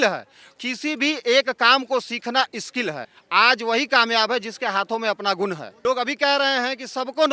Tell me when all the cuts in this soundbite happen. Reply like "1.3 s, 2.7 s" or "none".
3.1 s, 5.7 s